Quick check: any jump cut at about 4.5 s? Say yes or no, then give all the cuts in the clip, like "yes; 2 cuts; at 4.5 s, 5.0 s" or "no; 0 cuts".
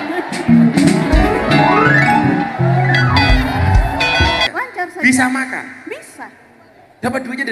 yes; 1 cut; at 4.5 s